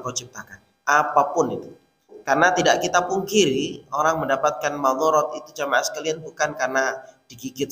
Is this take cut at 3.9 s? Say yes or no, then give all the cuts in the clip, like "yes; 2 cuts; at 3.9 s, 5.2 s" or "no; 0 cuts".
no; 1 cut; at 2.1 s